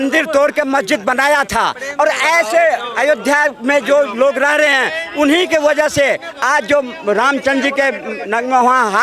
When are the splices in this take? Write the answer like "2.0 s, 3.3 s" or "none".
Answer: none